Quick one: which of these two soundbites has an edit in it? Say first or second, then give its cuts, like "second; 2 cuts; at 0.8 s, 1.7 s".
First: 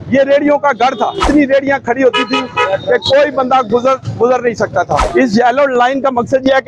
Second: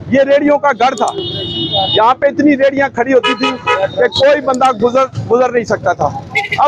first; 2 cuts; at 1.2 s, 5.1 s